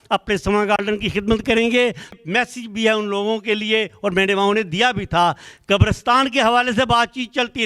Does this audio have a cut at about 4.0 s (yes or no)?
no